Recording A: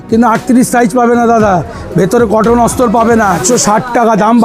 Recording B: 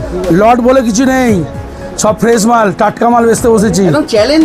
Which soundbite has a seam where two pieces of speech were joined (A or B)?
A